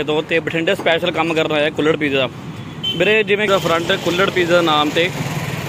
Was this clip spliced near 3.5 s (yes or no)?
yes